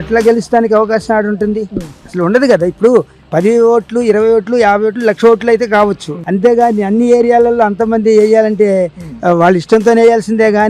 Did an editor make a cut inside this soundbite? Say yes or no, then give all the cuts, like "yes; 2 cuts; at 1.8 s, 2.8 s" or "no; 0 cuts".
no; 0 cuts